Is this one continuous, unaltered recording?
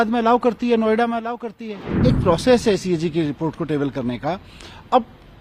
no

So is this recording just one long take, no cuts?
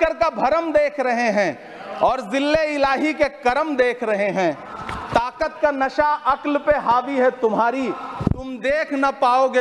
yes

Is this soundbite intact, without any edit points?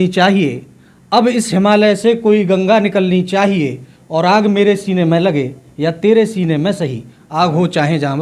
yes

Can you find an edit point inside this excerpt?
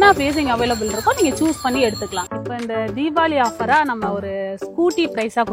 yes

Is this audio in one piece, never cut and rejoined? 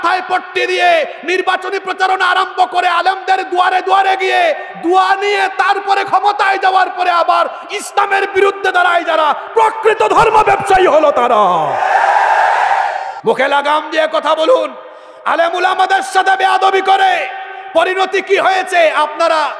no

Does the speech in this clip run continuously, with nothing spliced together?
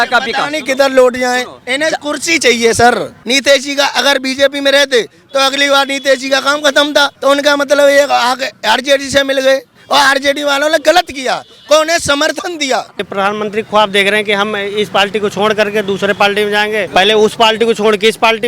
no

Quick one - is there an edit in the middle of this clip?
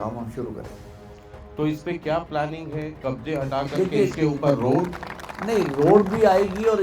no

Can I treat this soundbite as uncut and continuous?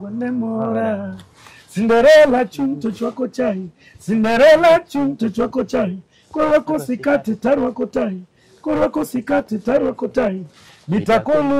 yes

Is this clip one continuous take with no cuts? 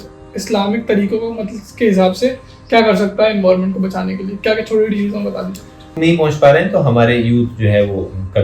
no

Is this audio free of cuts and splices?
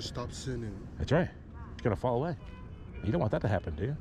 no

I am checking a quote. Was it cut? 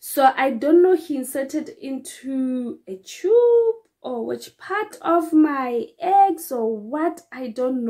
no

